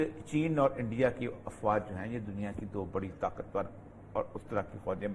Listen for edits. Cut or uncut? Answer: uncut